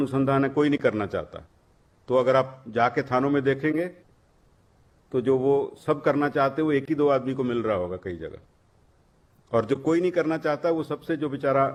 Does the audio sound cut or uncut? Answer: uncut